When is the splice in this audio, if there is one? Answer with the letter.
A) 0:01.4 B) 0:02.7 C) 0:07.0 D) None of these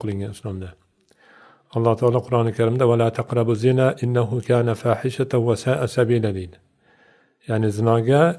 B